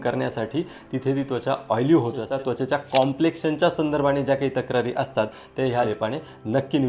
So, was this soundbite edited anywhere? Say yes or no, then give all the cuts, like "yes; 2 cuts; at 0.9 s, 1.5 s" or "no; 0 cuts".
yes; 2 cuts; at 2.3 s, 5.9 s